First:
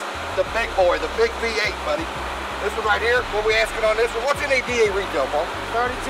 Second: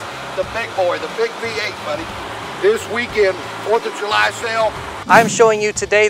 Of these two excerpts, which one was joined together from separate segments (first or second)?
second